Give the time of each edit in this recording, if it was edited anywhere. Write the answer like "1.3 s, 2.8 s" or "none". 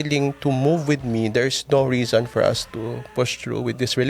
none